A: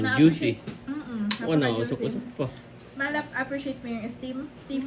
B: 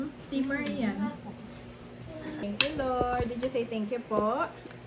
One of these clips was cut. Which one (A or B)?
B